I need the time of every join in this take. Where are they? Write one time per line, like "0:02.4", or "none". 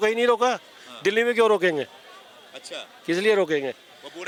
none